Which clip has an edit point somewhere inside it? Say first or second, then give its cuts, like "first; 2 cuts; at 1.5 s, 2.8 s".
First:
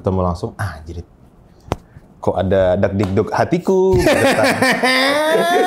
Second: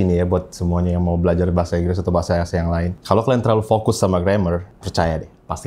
second; 2 cuts; at 3.0 s, 4.8 s